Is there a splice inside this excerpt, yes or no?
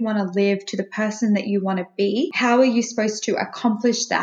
yes